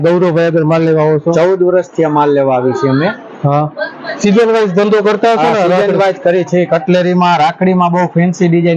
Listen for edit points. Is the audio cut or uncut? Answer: uncut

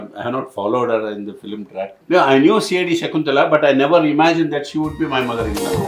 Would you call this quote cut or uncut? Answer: cut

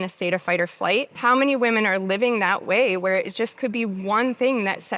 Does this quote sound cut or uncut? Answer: cut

